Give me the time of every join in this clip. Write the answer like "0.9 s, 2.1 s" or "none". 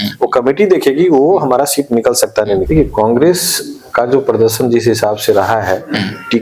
2.6 s